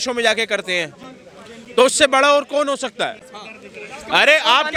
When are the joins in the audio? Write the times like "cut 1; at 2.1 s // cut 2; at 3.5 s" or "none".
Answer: none